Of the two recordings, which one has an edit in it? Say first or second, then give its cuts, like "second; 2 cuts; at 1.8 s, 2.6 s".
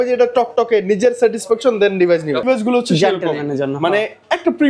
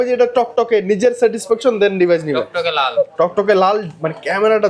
first; 1 cut; at 2.5 s